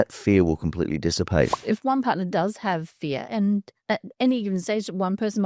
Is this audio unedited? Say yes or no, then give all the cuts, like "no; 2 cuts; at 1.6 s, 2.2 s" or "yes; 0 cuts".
no; 1 cut; at 1.5 s